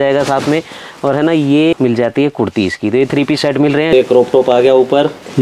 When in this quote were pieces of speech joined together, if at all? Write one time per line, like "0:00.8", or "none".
0:01.7
0:03.9